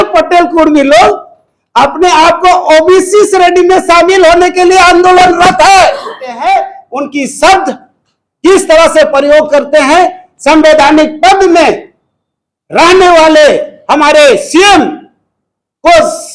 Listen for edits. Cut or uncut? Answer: cut